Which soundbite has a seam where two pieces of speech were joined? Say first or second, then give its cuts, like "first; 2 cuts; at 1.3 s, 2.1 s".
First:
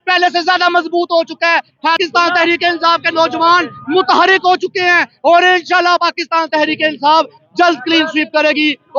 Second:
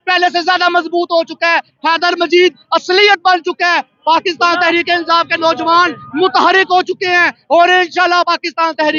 first; 1 cut; at 2.0 s